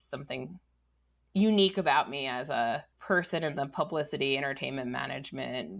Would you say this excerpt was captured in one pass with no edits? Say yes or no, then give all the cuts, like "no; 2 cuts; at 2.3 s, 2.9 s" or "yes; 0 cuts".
no; 1 cut; at 2.9 s